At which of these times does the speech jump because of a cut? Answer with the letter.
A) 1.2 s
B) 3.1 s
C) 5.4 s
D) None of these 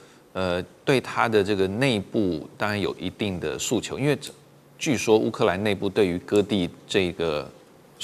D